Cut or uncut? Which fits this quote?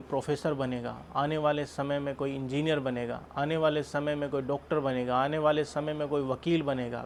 uncut